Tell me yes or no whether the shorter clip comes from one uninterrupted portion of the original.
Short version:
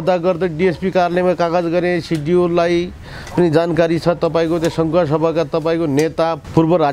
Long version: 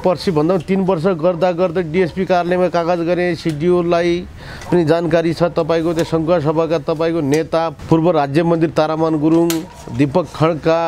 yes